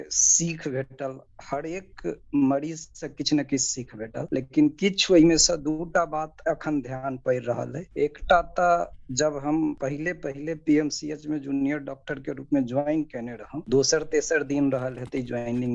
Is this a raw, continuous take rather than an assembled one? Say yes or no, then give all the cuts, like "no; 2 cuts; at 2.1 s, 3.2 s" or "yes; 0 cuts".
yes; 0 cuts